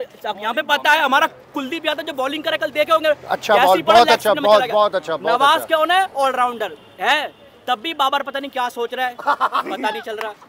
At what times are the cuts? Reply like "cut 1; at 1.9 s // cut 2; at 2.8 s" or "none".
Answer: none